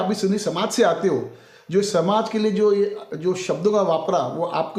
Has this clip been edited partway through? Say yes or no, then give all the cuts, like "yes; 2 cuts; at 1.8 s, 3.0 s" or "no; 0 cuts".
no; 0 cuts